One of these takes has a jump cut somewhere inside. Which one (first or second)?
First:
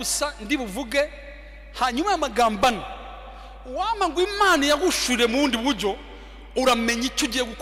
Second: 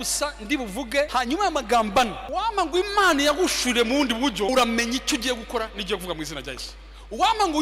second